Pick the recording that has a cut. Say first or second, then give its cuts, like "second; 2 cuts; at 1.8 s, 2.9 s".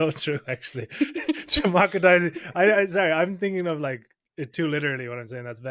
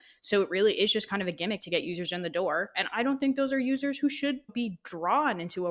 second; 1 cut; at 4.5 s